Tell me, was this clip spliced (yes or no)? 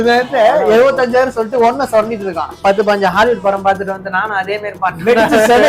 yes